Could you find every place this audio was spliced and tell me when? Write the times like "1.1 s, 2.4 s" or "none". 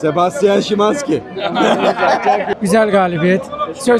none